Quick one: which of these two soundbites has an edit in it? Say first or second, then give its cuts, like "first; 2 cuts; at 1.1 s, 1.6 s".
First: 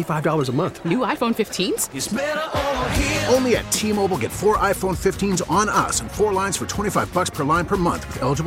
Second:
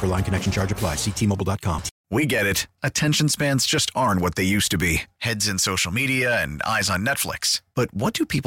second; 1 cut; at 1.9 s